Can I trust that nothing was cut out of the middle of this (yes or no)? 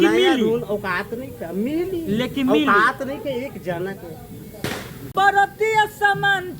no